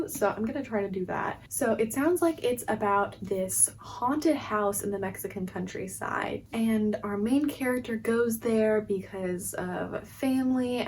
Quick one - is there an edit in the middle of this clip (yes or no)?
no